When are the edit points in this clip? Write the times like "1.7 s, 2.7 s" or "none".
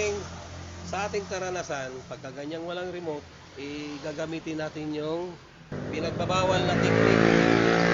5.7 s